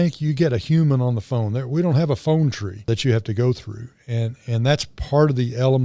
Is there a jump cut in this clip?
yes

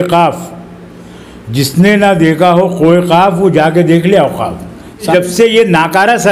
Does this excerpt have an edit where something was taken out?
yes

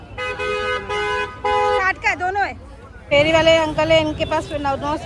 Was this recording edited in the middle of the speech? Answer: yes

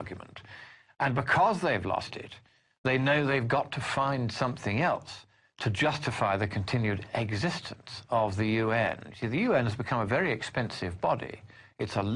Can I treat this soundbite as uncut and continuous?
no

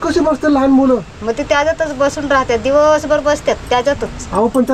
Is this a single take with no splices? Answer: yes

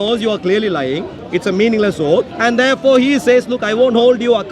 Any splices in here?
yes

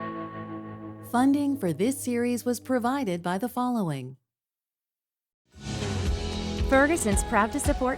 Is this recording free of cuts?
no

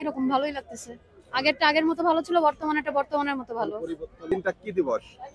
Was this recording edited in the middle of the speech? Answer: yes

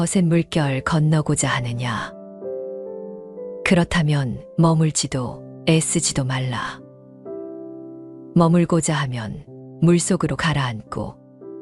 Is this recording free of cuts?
no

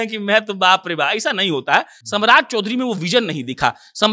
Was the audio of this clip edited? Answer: yes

